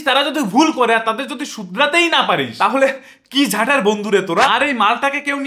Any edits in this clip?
yes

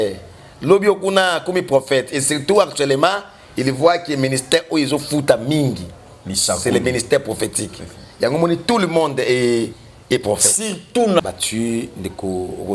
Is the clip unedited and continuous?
no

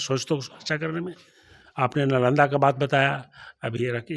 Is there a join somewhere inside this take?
no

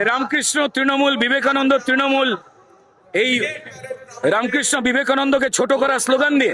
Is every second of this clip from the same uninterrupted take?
yes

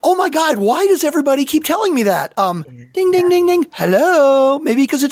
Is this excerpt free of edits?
yes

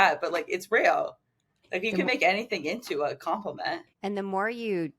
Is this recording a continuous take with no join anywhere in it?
no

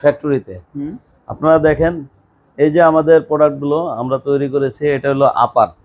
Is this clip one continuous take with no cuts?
yes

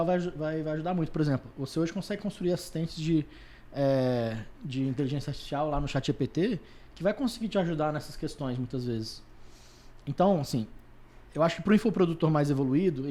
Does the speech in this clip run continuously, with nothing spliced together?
yes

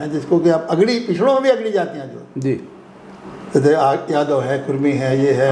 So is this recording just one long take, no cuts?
yes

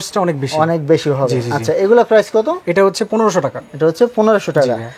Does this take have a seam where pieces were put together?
no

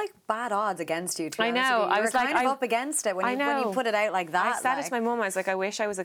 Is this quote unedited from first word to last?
yes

